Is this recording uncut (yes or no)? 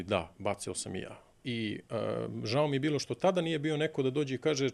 yes